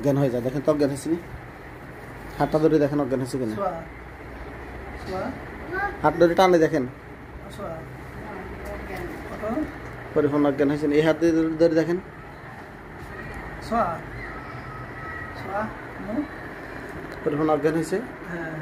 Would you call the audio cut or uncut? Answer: uncut